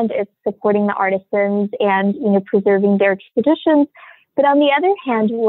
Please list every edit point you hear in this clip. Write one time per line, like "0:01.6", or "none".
none

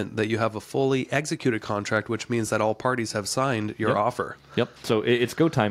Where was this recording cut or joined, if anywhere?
0:04.8

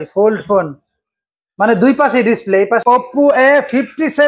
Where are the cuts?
0:02.8

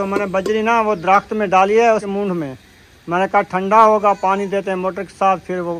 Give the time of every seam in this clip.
0:02.1

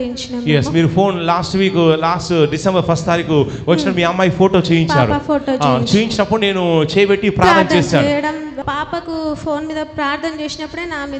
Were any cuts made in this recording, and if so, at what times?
0:08.5

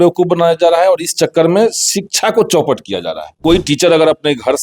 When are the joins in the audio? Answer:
0:03.4

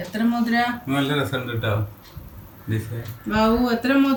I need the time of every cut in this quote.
none

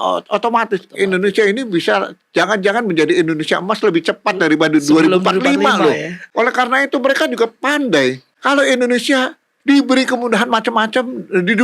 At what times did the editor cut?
0:06.2
0:08.3

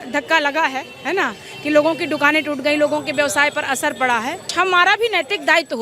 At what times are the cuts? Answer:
0:04.5

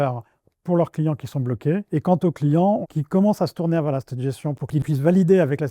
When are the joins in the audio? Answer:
0:01.8
0:02.8
0:04.7

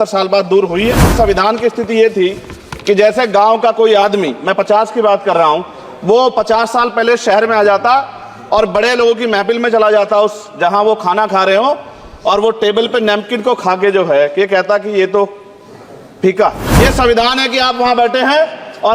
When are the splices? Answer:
0:01.1
0:16.6

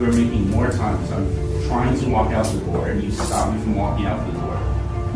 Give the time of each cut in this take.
none

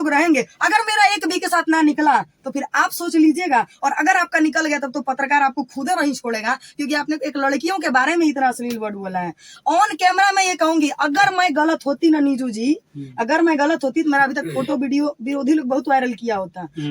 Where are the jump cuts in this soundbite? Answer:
none

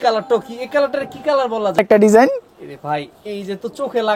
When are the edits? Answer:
0:01.8

